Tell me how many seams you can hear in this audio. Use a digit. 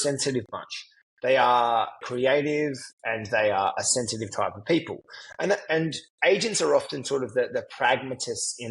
1